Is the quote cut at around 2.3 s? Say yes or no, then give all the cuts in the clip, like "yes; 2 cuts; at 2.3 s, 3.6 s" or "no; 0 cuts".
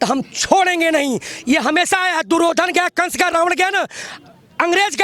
no; 0 cuts